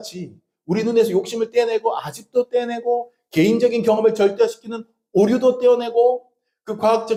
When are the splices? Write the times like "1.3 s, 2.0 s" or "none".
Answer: none